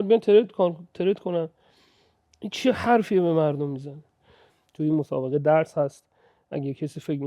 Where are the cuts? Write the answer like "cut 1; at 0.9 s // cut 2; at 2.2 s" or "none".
cut 1; at 4.5 s